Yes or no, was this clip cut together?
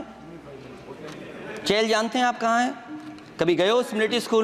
no